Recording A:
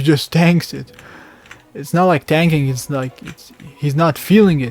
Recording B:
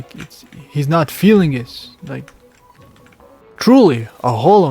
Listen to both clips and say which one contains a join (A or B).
B